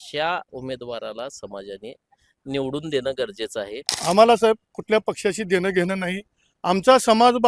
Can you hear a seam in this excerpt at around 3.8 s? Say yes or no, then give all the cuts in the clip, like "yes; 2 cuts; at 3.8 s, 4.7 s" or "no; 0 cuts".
yes; 1 cut; at 3.8 s